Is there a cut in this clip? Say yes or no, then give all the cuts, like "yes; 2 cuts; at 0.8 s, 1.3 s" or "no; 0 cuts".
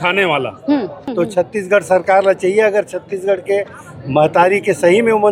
yes; 1 cut; at 1.1 s